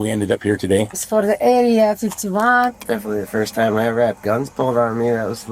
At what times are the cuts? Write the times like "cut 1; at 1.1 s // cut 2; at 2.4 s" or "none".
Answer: cut 1; at 1.0 s // cut 2; at 2.7 s